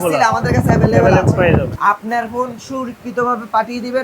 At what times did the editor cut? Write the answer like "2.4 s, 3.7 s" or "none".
1.7 s